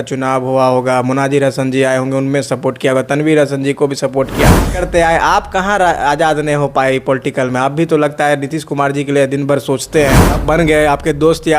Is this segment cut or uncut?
cut